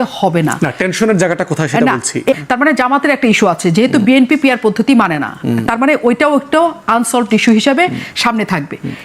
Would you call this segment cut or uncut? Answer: uncut